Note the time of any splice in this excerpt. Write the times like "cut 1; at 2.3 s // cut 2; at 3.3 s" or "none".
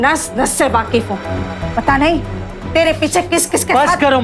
none